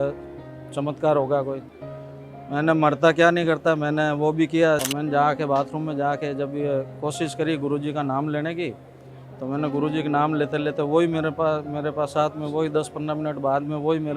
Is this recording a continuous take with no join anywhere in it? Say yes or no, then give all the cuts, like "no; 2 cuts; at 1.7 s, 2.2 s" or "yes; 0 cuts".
no; 1 cut; at 4.9 s